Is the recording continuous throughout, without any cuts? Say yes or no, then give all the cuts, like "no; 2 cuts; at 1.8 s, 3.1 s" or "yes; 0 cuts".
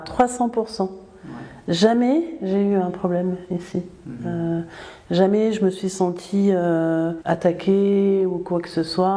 yes; 0 cuts